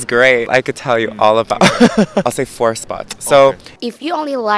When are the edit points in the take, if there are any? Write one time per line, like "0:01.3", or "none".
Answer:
0:03.7